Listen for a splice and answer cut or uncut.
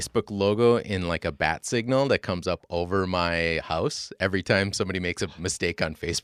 uncut